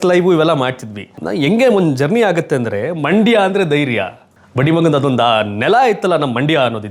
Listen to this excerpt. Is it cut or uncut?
cut